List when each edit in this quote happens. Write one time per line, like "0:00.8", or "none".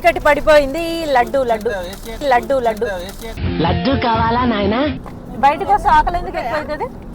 0:05.1

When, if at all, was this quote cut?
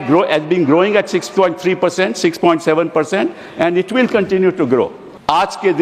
0:04.6

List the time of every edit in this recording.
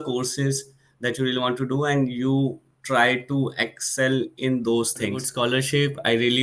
0:05.3

